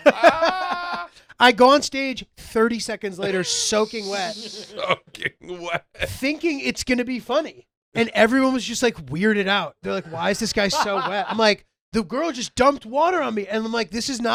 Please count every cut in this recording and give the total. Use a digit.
0